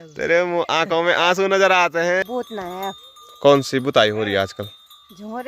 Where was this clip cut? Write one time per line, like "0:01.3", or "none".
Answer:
0:02.2